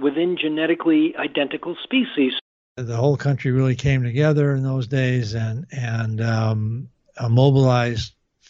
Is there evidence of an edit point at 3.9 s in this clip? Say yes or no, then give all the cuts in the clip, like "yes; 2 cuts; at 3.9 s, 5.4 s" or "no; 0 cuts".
no; 1 cut; at 2.4 s